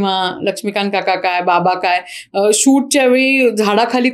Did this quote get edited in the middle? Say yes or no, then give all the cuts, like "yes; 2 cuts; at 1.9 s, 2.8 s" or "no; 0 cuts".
no; 0 cuts